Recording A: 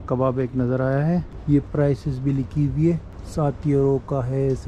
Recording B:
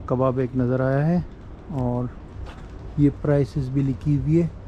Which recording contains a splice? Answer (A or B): A